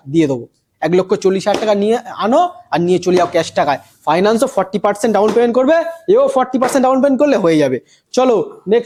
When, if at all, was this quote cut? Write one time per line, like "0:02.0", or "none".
none